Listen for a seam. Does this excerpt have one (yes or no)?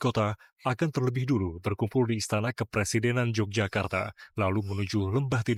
no